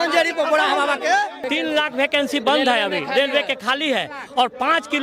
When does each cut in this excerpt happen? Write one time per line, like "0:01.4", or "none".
0:01.5